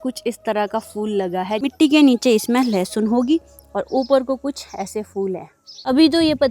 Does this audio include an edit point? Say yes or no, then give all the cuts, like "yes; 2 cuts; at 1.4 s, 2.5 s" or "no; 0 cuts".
yes; 2 cuts; at 1.6 s, 5.5 s